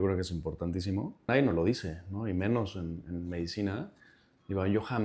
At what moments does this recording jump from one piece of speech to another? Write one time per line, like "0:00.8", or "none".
0:01.3